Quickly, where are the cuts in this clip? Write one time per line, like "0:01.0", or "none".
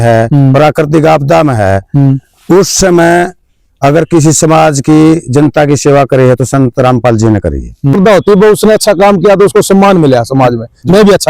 0:07.9

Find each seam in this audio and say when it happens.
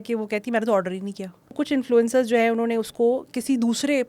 0:01.5

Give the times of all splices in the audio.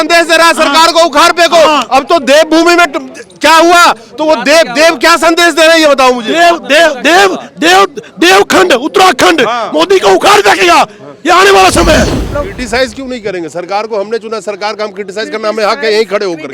0:12.3

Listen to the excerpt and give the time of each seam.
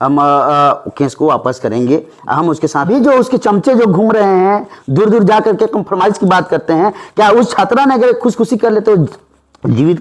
0:02.9

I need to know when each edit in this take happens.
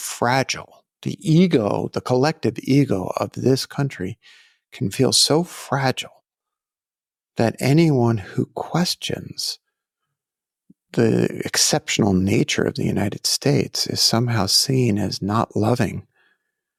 none

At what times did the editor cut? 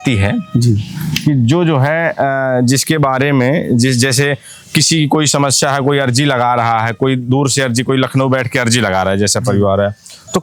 none

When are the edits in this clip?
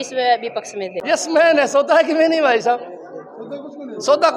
0:01.0

